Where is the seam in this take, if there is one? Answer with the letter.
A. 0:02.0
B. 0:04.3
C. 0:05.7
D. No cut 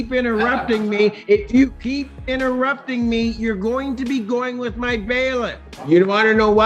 C